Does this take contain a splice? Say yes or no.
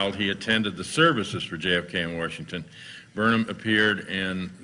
no